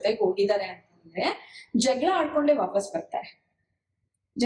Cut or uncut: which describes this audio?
uncut